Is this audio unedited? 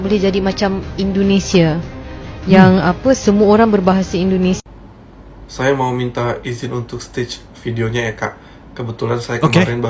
yes; 0 cuts

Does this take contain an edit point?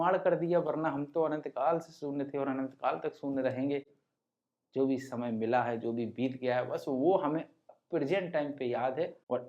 no; 0 cuts

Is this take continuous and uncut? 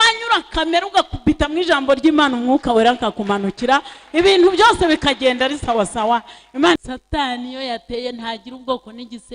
no; 1 cut; at 6.8 s

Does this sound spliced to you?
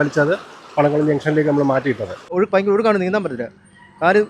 yes; 1 cut; at 2.3 s

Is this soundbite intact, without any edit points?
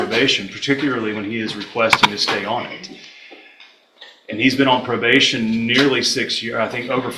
yes; 0 cuts

